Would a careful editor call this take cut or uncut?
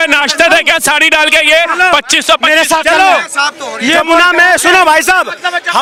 uncut